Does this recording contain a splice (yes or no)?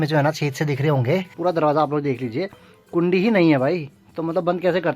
yes